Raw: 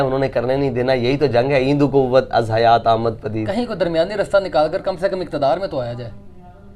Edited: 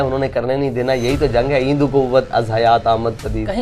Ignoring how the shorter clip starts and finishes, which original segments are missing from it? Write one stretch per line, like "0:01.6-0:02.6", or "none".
none